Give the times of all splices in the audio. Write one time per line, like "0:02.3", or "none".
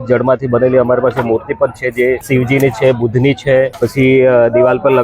0:02.2
0:03.7